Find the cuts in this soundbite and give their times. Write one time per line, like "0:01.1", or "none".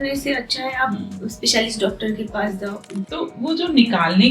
0:02.9